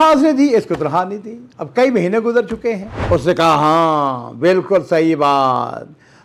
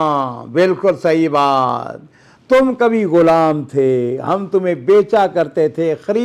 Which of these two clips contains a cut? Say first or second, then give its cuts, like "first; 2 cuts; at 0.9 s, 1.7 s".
first; 1 cut; at 2.9 s